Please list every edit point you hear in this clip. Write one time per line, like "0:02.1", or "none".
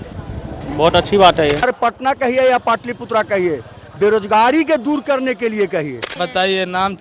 0:01.6
0:06.1